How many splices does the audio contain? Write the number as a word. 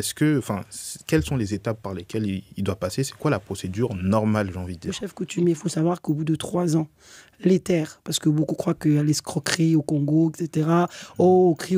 one